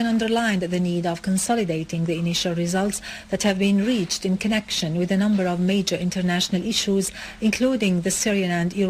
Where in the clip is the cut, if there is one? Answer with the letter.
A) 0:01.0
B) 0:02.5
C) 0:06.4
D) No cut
D